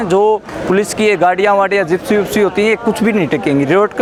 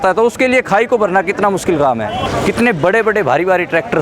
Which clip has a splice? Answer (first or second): second